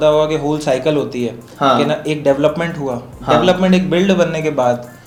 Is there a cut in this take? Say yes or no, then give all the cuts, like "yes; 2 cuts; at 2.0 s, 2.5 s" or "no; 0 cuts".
no; 0 cuts